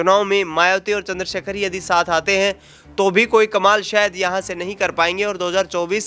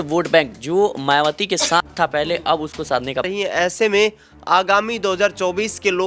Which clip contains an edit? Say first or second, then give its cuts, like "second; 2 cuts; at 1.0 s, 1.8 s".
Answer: second; 1 cut; at 3.3 s